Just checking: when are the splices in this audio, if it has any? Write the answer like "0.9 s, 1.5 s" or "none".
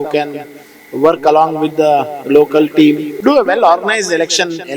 3.1 s